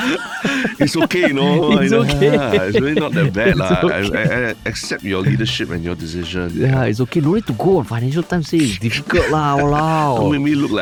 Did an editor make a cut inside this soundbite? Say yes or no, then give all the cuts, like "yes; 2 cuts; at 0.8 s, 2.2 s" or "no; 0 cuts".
no; 0 cuts